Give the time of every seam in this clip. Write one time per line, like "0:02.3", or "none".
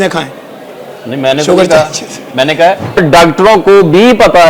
0:03.0